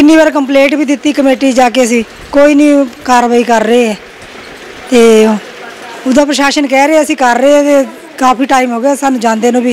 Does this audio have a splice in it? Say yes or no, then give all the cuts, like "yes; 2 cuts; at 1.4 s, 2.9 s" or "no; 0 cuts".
no; 0 cuts